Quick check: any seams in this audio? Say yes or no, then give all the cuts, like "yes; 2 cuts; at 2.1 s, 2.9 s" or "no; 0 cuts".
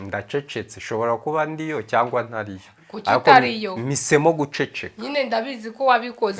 no; 0 cuts